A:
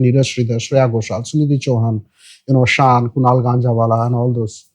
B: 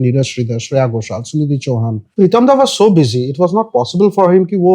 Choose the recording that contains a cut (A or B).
B